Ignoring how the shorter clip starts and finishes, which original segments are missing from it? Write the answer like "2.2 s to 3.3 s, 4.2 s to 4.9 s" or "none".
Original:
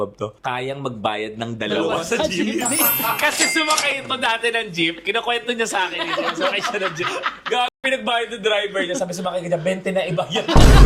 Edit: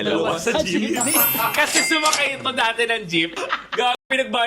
5.0 s to 7.1 s